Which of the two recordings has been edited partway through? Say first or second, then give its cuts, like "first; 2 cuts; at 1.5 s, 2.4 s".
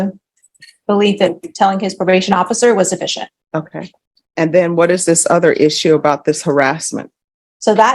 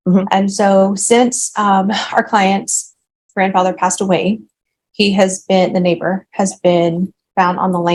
first; 1 cut; at 3.1 s